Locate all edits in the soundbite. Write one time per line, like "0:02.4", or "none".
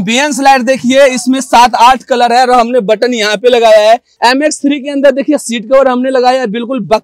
0:04.1

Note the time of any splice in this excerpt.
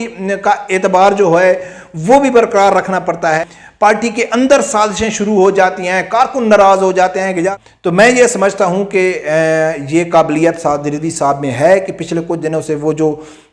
0:03.4
0:07.6

